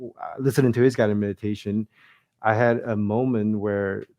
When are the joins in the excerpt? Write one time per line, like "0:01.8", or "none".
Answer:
0:02.0